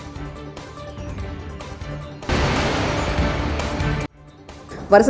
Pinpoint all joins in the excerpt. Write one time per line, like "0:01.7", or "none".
0:00.7
0:02.2
0:04.0